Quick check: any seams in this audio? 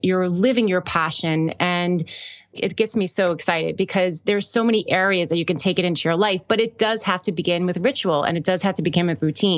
no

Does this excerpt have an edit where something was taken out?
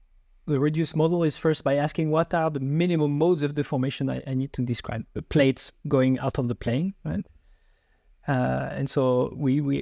yes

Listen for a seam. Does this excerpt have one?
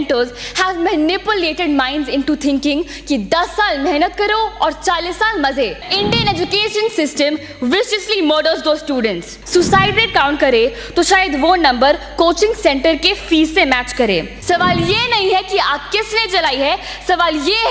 yes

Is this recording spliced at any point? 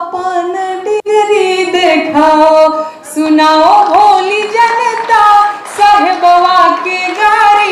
no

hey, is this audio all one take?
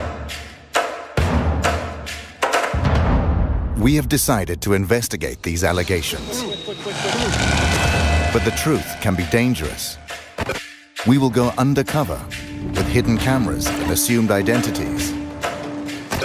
no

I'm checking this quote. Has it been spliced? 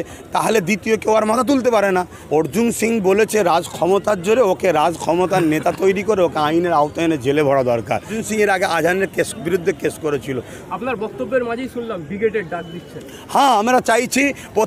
yes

